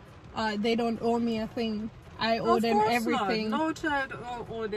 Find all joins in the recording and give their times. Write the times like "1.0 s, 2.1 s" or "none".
none

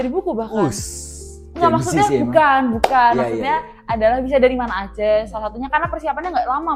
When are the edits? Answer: none

